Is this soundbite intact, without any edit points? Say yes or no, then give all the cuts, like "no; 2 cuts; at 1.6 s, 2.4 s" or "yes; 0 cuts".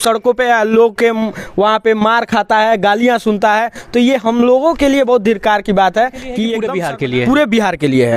no; 1 cut; at 6.7 s